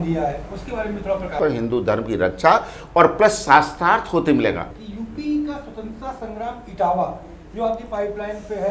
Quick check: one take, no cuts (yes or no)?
no